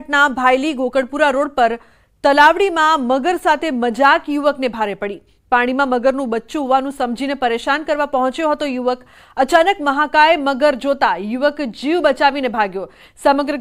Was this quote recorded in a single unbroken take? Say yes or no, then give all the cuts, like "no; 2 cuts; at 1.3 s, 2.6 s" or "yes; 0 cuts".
no; 1 cut; at 9.8 s